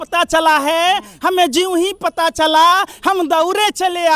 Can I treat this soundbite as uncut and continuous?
yes; 0 cuts

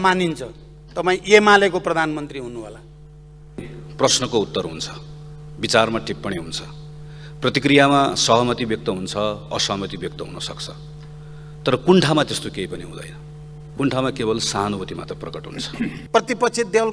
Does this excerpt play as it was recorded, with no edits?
no; 2 cuts; at 3.8 s, 16.0 s

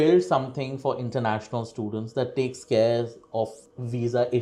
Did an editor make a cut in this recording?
no; 0 cuts

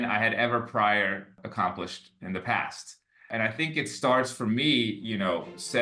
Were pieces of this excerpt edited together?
yes; 2 cuts; at 1.4 s, 3.3 s

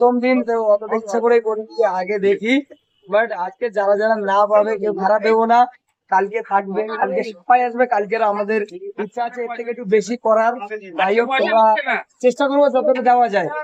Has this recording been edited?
no; 0 cuts

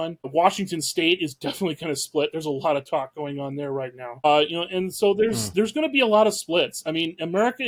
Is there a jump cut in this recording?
no; 0 cuts

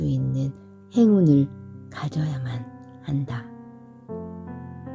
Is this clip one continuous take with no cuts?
yes; 0 cuts

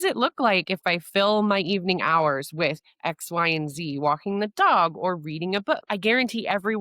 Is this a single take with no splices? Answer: no; 1 cut; at 5.8 s

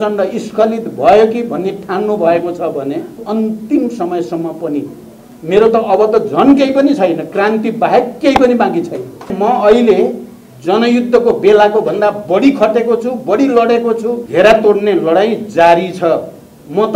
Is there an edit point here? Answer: yes; 3 cuts; at 3.2 s, 9.3 s, 14.2 s

